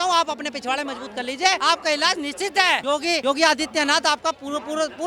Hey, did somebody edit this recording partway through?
yes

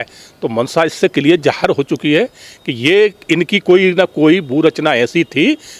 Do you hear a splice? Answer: no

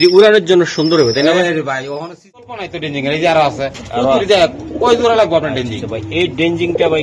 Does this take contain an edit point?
yes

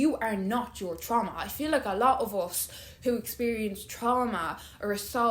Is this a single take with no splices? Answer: yes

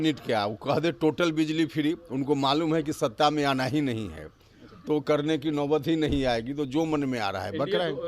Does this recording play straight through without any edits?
yes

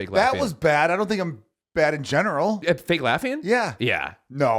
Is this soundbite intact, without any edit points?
no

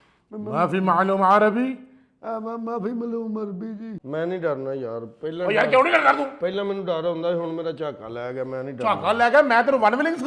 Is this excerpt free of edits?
no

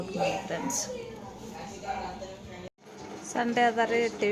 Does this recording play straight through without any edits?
yes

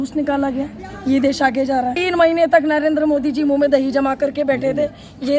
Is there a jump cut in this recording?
yes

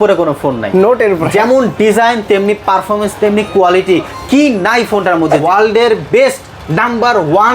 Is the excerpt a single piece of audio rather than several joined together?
no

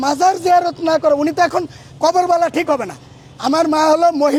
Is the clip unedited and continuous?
yes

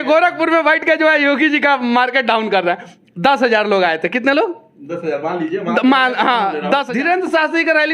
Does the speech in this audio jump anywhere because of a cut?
yes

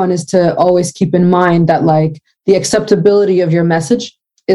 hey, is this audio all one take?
yes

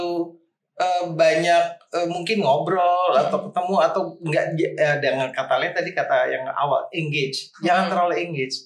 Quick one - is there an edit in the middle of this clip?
no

